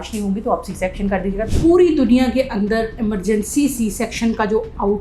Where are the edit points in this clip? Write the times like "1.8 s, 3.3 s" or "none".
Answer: 1.5 s